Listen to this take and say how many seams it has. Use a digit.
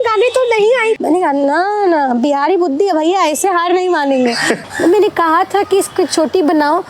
2